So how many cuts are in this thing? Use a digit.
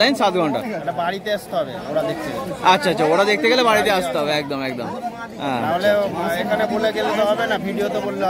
0